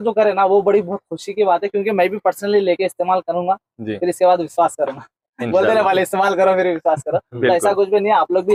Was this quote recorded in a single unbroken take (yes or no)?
yes